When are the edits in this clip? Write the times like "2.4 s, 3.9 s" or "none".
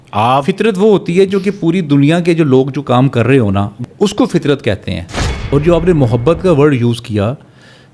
5.4 s